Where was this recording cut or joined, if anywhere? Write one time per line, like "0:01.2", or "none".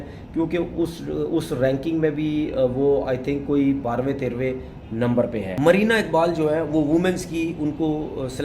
0:05.4